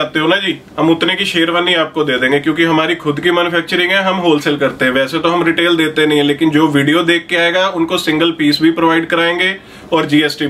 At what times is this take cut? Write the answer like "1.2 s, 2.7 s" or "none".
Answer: none